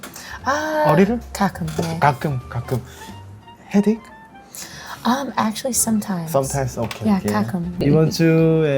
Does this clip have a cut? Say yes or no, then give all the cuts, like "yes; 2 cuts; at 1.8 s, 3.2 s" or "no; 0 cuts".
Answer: yes; 1 cut; at 7.8 s